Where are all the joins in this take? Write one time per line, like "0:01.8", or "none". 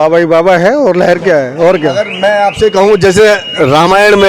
none